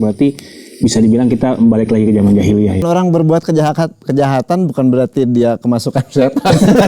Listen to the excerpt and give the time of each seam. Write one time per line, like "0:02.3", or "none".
0:02.8